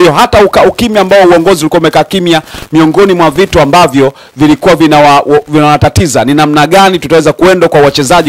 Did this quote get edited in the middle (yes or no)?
no